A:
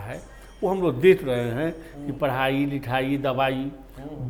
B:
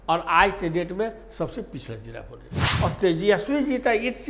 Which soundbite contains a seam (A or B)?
B